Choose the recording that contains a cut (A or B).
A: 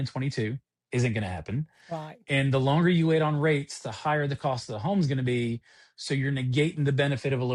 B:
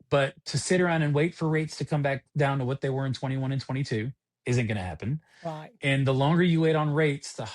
B